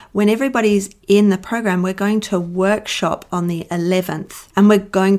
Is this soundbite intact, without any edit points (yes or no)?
yes